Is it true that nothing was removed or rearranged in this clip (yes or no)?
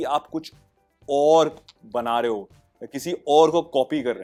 yes